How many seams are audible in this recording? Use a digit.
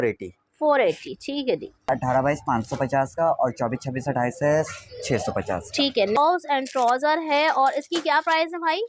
2